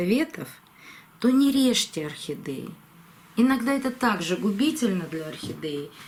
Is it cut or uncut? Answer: uncut